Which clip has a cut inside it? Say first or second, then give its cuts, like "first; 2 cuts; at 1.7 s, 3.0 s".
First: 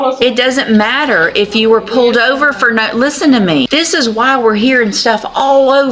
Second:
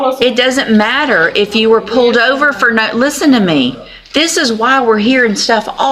first; 1 cut; at 3.7 s